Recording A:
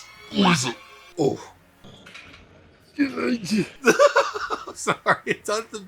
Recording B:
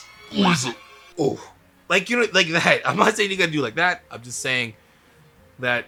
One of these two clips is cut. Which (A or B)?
A